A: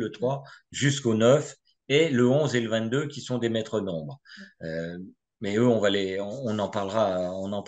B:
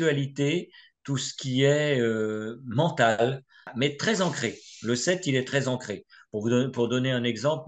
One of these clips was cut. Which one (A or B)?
B